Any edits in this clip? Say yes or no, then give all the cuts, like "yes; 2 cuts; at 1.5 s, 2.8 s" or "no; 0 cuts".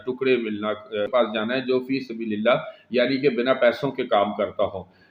yes; 1 cut; at 1.1 s